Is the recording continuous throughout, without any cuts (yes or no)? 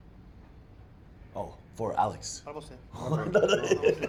yes